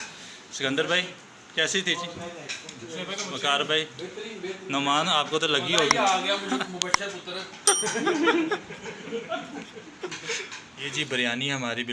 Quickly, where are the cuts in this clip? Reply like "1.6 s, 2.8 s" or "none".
10.8 s